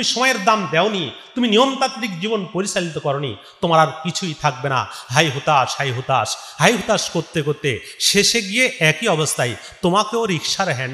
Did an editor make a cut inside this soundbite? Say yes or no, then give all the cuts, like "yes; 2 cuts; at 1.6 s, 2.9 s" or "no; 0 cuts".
no; 0 cuts